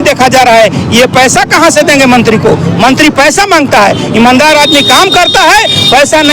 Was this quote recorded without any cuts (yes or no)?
yes